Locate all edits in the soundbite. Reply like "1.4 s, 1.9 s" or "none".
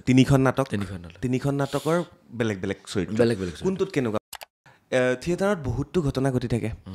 4.2 s

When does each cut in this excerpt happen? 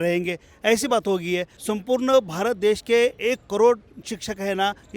1.5 s

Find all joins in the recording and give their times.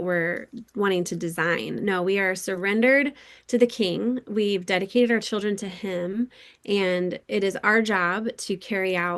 none

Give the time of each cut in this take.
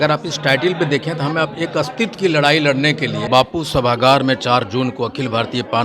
3.3 s

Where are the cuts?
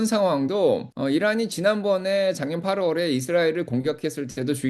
0.9 s

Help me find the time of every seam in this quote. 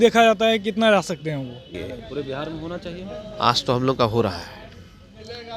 1.8 s

